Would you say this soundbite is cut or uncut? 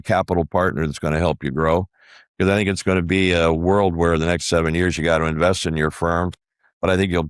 uncut